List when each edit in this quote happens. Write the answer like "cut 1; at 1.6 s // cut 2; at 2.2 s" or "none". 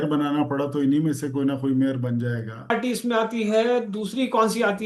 cut 1; at 2.7 s